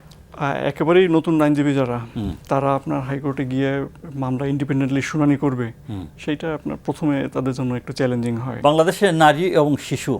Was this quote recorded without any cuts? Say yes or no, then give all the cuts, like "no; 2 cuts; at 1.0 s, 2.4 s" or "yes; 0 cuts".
no; 1 cut; at 8.5 s